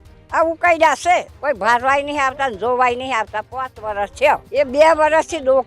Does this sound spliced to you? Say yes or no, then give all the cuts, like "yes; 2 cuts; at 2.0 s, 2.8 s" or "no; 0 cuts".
yes; 2 cuts; at 1.3 s, 4.5 s